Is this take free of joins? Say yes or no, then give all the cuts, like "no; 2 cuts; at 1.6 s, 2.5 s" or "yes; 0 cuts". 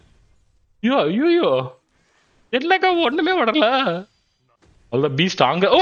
yes; 0 cuts